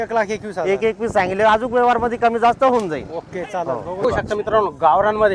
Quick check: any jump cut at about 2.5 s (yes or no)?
no